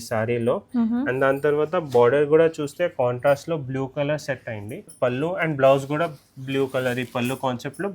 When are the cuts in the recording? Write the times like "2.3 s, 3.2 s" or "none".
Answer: 4.9 s